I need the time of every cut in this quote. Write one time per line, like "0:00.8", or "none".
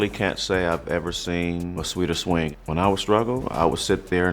0:02.5